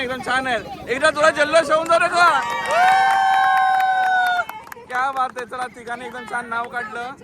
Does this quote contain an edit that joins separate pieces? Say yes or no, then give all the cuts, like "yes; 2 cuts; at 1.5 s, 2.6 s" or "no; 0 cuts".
no; 0 cuts